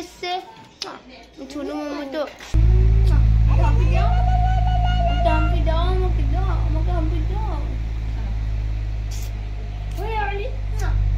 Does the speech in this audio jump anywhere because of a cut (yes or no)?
yes